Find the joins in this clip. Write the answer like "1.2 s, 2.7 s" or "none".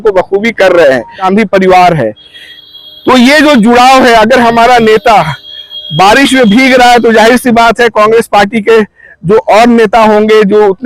1.2 s